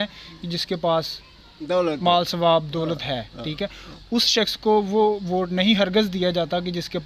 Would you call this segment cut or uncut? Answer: uncut